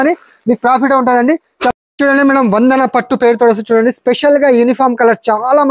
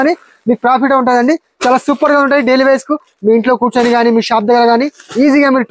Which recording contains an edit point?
first; 1 cut; at 1.7 s

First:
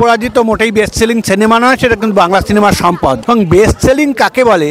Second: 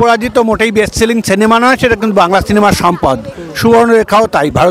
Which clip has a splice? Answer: first; 1 cut; at 3.2 s

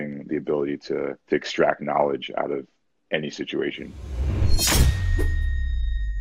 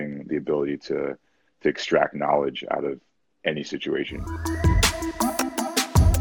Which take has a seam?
first; 2 cuts; at 1.2 s, 4.3 s

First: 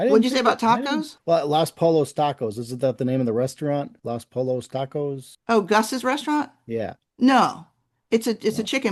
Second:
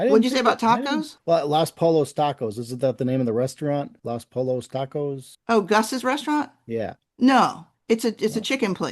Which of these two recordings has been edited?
second; 1 cut; at 7.7 s

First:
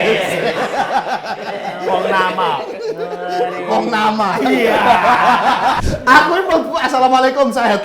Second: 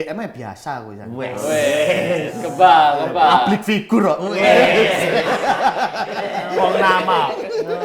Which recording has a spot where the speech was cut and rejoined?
first; 1 cut; at 5.8 s

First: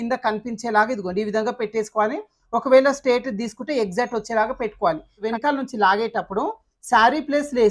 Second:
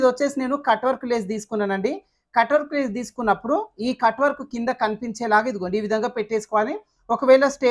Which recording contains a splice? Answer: first; 1 cut; at 5.2 s

